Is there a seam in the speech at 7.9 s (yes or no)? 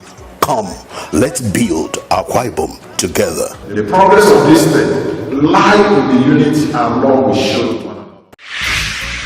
yes